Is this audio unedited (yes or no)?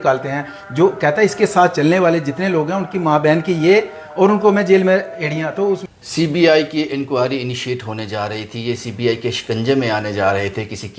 no